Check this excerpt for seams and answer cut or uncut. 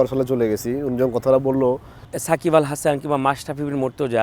cut